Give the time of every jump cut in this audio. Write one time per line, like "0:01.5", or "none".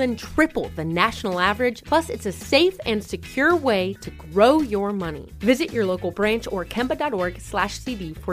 none